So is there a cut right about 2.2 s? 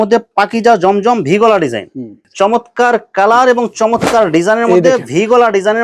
yes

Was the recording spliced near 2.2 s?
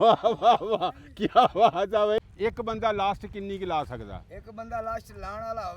yes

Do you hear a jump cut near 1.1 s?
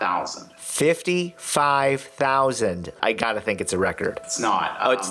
no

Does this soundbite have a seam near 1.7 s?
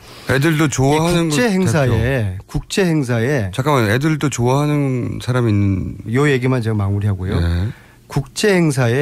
no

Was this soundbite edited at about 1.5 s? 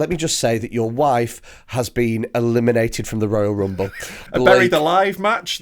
no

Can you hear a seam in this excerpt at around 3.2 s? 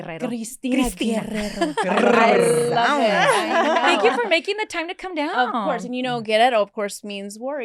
no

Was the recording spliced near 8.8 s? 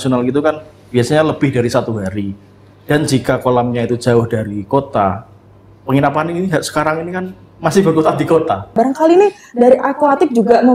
yes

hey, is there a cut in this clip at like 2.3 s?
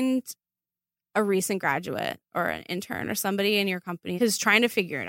no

